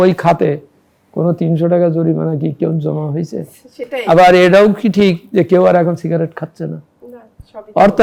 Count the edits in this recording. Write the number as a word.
zero